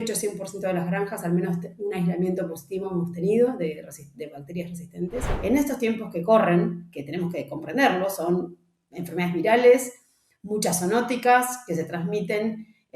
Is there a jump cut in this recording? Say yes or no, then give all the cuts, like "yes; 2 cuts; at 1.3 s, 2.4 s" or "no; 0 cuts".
yes; 1 cut; at 5.3 s